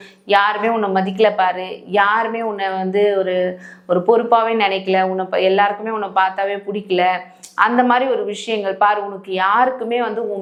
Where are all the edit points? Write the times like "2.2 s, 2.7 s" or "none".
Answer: none